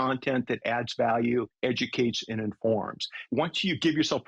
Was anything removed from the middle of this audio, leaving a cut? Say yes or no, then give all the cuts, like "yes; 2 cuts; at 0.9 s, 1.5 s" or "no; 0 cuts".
yes; 2 cuts; at 1.5 s, 3.3 s